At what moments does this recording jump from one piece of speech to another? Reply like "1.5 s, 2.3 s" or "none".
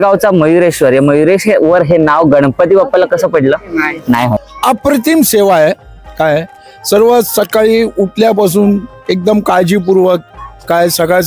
4.5 s